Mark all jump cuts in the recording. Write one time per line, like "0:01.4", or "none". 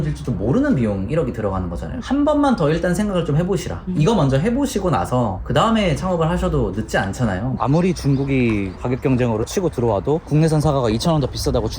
0:02.0
0:07.5
0:10.3